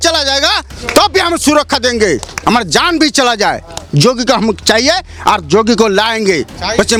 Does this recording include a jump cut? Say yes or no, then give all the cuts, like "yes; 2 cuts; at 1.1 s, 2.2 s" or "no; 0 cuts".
no; 0 cuts